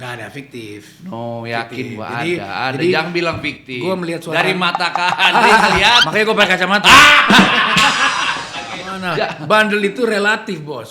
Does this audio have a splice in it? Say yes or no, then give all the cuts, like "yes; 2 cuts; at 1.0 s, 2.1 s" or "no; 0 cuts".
yes; 1 cut; at 8.9 s